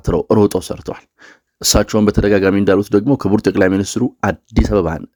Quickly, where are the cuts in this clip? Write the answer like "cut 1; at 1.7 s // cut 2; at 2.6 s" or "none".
none

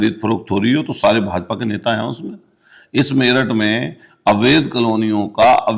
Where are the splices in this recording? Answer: none

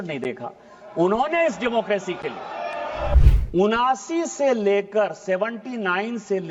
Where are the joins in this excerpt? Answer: cut 1; at 3.2 s

